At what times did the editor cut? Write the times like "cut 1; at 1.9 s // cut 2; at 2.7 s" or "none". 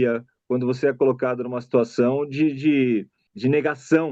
cut 1; at 3.2 s